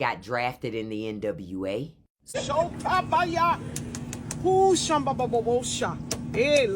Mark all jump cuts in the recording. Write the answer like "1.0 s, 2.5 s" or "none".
2.4 s